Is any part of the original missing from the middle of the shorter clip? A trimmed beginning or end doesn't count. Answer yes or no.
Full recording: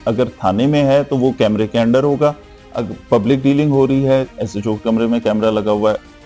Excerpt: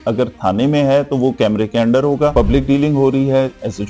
yes